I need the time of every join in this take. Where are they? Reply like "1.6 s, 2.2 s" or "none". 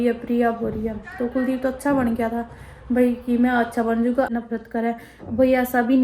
4.3 s